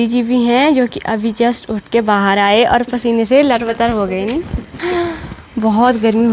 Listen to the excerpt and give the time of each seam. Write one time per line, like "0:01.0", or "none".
none